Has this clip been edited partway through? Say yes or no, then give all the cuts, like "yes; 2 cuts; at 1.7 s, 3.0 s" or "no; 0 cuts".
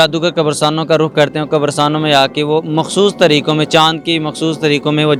no; 0 cuts